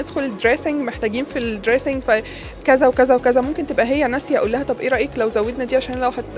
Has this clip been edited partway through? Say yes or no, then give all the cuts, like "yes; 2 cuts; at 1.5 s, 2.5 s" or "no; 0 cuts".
no; 0 cuts